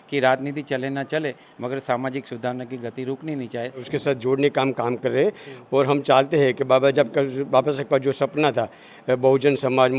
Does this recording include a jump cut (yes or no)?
yes